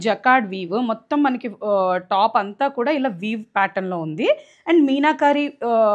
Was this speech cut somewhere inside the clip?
no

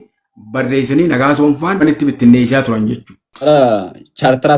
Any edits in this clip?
yes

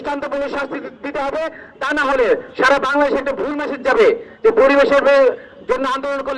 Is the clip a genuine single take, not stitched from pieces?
yes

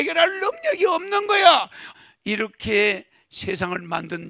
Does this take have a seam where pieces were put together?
yes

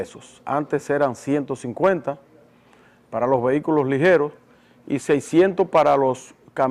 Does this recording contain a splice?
yes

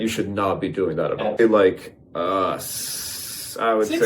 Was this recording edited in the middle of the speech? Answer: yes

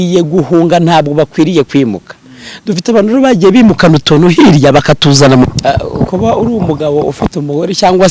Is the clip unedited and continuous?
no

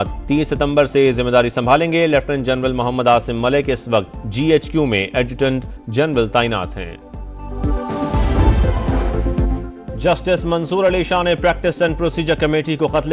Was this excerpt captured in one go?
no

